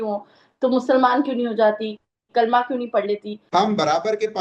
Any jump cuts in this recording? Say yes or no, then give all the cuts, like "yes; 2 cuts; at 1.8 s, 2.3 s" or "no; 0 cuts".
yes; 1 cut; at 3.4 s